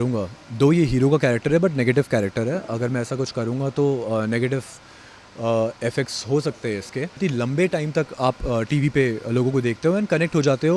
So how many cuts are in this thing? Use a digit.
1